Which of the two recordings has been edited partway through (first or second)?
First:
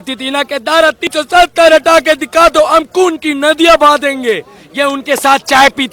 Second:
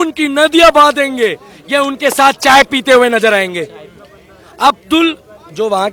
first